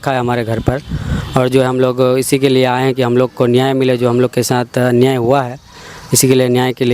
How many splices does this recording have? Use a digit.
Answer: 0